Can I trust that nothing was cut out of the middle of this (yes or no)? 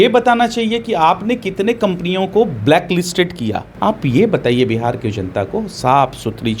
no